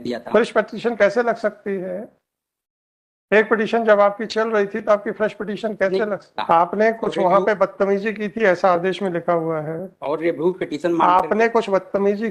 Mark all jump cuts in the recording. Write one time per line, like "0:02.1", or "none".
0:06.3